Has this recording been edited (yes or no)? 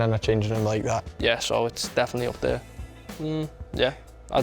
yes